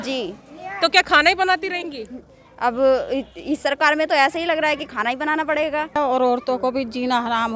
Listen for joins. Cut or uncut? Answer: cut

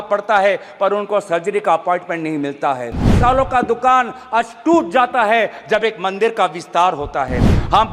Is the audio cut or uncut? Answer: cut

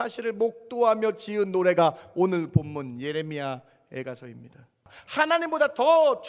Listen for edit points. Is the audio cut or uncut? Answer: cut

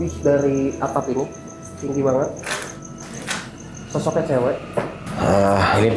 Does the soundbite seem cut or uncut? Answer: cut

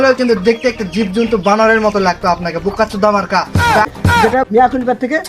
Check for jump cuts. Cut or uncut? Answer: cut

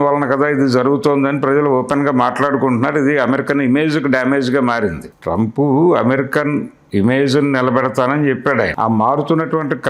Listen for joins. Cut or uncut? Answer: cut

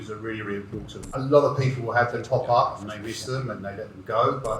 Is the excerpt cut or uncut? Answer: cut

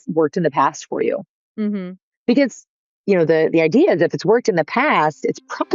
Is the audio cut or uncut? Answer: uncut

